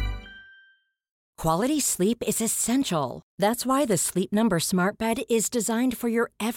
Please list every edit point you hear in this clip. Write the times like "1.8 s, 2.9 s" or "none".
1.3 s